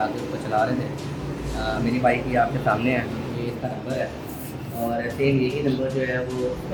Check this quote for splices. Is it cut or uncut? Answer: uncut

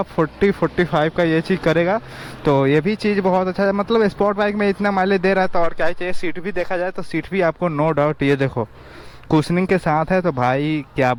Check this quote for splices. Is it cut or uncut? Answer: uncut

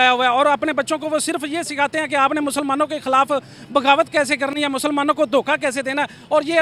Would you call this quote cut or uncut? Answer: uncut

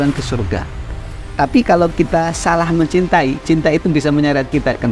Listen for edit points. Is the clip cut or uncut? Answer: uncut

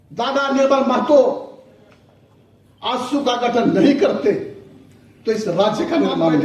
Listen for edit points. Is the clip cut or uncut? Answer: uncut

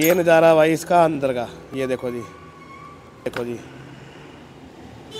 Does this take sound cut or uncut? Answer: cut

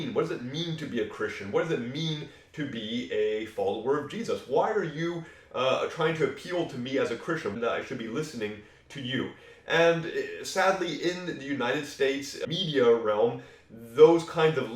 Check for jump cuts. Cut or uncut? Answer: cut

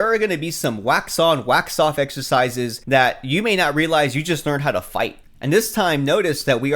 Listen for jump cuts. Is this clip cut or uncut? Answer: cut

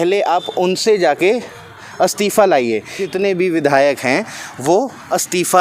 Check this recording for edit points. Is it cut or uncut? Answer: cut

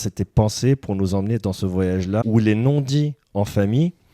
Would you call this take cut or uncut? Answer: cut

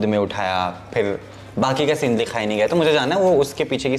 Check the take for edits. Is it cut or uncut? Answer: uncut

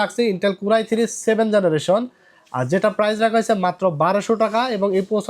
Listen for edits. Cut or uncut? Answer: uncut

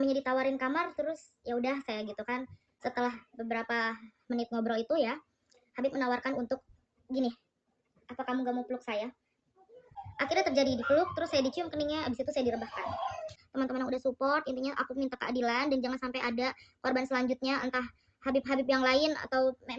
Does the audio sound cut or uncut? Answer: cut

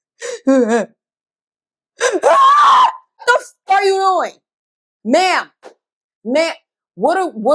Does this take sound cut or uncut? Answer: cut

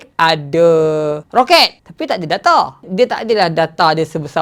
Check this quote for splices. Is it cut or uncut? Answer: uncut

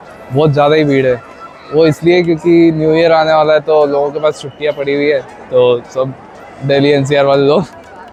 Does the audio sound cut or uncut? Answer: uncut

